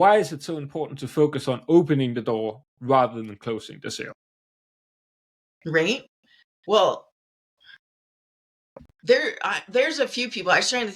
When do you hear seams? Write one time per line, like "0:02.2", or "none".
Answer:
none